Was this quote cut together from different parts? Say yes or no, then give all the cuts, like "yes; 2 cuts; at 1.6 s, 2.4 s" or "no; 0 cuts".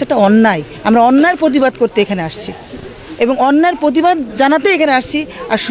no; 0 cuts